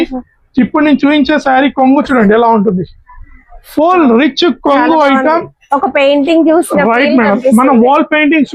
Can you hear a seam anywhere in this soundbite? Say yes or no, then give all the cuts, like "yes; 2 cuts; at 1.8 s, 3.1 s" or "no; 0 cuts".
no; 0 cuts